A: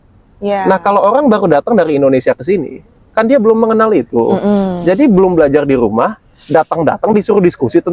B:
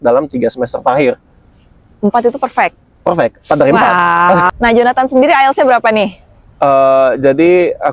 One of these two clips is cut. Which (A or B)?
B